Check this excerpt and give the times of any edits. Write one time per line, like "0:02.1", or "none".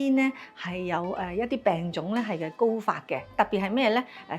0:03.3